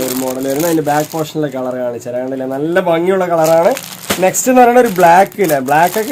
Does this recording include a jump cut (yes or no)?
no